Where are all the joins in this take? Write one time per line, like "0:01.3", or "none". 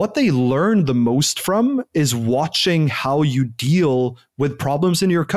none